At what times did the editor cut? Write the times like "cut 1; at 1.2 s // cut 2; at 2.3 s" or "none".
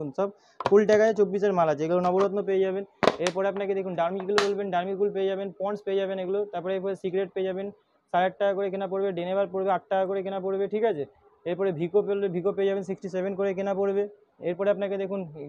none